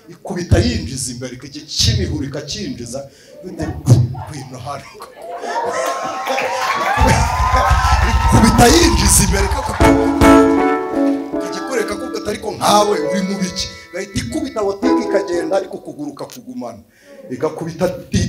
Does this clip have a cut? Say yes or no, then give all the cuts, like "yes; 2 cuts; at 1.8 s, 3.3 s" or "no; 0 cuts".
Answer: no; 0 cuts